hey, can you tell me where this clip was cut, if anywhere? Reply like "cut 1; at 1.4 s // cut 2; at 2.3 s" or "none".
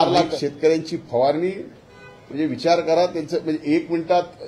none